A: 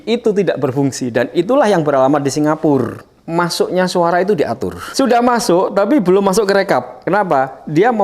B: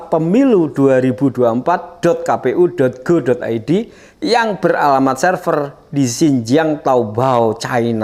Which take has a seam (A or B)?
A